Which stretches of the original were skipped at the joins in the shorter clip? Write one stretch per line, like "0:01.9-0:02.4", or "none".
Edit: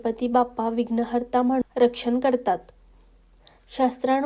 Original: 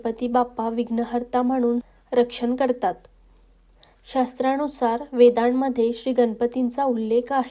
0:01.6-0:02.0